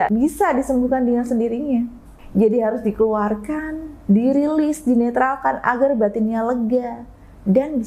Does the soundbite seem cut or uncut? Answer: uncut